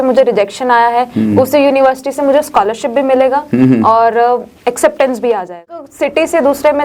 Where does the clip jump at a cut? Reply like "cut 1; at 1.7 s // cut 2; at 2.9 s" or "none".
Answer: cut 1; at 5.8 s

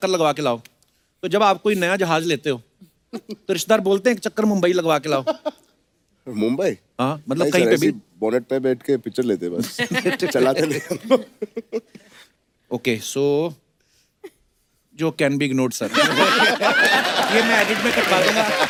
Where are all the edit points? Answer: none

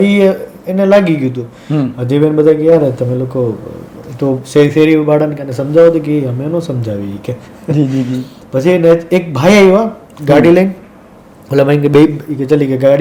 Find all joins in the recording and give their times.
none

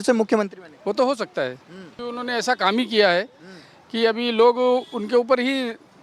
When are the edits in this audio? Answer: cut 1; at 1.9 s

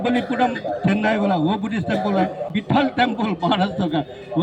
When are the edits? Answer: cut 1; at 2.5 s

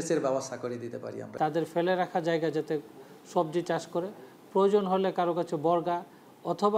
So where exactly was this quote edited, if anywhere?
cut 1; at 1.2 s

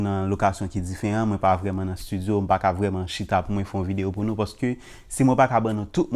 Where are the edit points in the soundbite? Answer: none

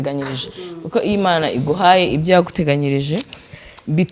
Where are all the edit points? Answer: none

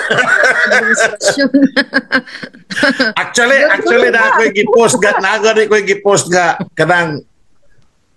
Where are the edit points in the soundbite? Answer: none

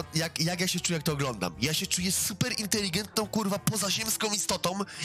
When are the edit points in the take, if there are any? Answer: none

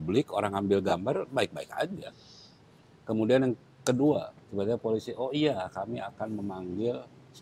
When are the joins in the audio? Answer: none

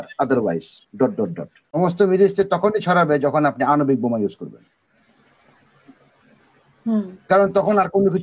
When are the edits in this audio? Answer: cut 1; at 1.8 s

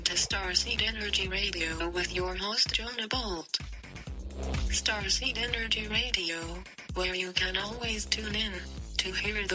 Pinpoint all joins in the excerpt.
none

